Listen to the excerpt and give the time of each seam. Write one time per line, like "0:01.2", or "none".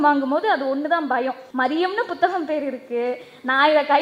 0:01.4